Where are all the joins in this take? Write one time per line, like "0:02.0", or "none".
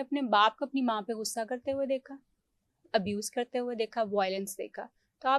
none

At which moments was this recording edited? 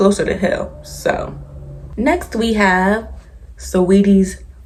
none

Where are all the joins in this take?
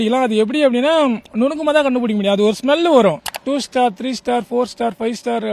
0:03.3

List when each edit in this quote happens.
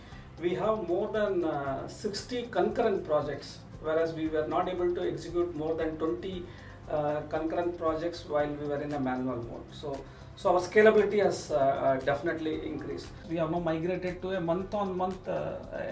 0:13.2

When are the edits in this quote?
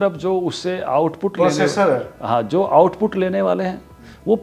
none

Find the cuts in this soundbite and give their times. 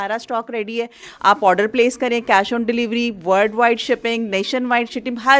none

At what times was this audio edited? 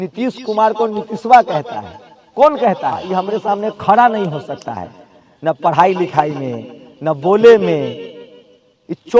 0:03.1

